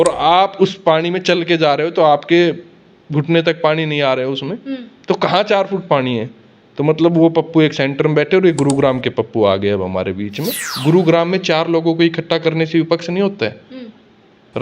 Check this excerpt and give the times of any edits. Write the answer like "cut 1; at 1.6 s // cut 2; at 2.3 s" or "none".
cut 1; at 10.7 s